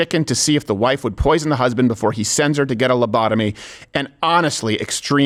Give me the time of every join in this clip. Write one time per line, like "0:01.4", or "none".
none